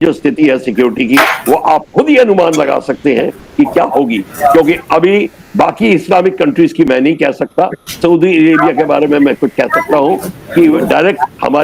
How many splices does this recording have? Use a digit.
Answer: 0